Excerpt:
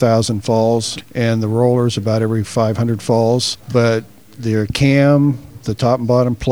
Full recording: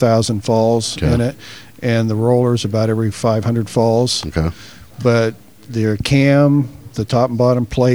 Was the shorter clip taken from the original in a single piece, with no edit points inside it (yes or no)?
no